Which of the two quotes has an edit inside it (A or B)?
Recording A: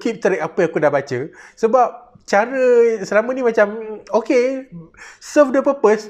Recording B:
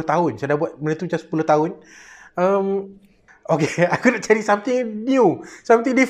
B